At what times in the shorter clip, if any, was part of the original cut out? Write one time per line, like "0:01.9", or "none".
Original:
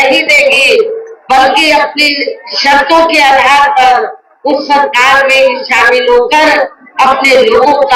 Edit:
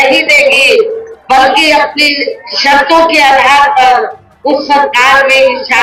none